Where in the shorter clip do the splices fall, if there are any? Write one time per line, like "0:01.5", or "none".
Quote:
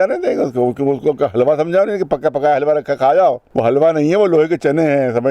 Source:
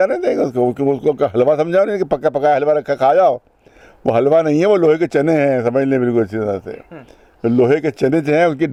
0:03.5